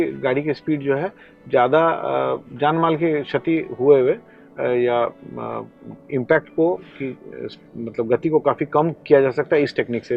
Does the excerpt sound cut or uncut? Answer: uncut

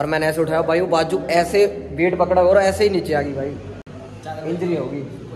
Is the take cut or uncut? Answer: uncut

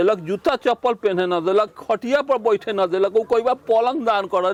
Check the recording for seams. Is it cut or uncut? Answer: uncut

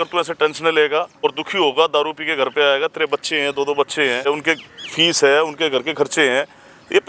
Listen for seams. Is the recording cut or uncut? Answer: cut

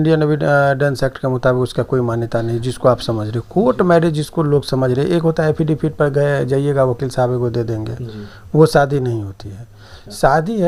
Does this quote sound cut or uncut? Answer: uncut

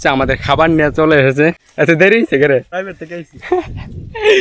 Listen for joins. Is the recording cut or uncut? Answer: cut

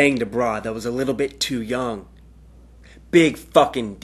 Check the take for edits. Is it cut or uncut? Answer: uncut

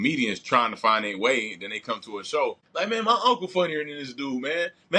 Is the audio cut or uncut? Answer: cut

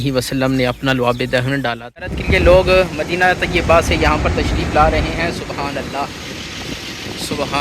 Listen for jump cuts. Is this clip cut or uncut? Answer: cut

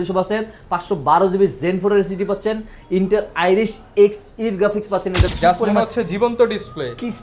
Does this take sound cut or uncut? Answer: cut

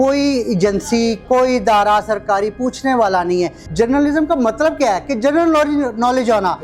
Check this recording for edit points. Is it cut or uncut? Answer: cut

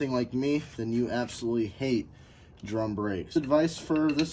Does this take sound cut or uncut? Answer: cut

